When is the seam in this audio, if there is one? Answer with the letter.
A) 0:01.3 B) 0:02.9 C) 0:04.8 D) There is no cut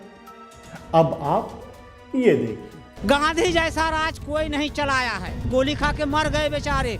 B